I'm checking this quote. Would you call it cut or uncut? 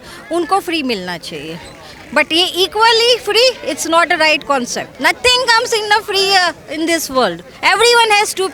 uncut